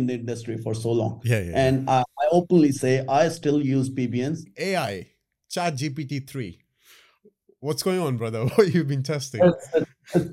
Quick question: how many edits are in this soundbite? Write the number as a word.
one